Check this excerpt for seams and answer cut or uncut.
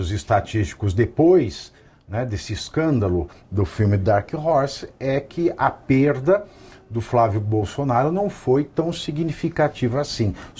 uncut